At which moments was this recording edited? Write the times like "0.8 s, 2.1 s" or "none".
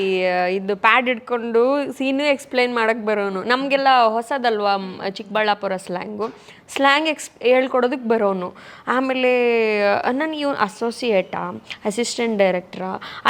none